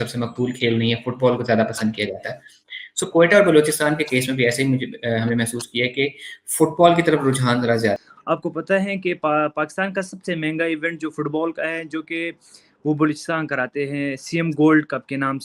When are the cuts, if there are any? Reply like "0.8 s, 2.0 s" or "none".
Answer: 8.0 s